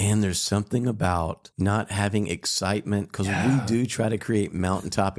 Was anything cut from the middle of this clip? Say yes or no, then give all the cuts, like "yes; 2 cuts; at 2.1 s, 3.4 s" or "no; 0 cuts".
yes; 1 cut; at 1.4 s